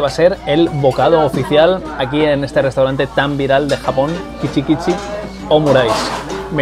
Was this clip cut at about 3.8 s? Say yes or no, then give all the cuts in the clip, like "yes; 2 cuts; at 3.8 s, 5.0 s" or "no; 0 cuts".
no; 0 cuts